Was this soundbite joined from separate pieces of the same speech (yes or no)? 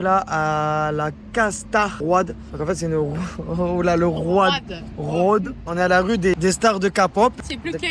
no